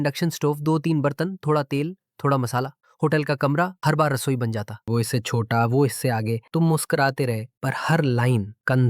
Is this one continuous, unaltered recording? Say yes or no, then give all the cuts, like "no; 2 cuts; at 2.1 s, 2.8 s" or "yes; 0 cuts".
no; 1 cut; at 4.8 s